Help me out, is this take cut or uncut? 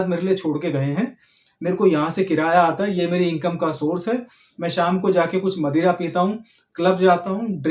uncut